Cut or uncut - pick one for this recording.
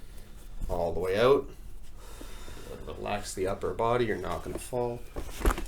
uncut